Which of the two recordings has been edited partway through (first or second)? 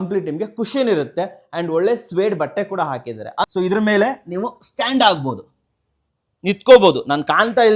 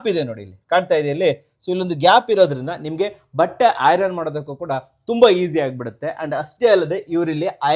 first